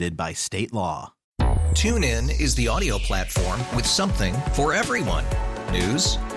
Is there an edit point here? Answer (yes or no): yes